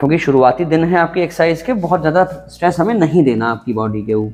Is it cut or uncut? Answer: uncut